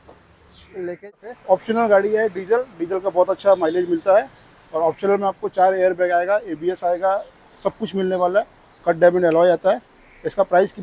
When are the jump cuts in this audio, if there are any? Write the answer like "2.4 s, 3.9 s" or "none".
0.9 s